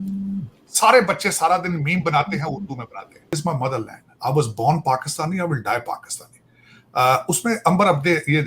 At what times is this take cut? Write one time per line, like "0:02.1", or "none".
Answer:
0:03.4